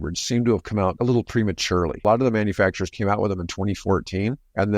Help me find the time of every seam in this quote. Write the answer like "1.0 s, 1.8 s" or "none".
1.0 s, 2.0 s